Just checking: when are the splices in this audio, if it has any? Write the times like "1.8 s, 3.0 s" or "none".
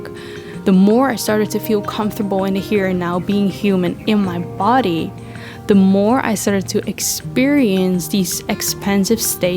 none